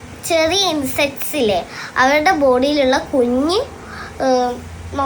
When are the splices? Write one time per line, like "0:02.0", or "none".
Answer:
none